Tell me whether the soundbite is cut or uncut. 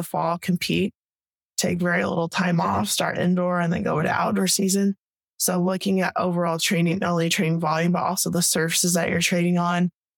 uncut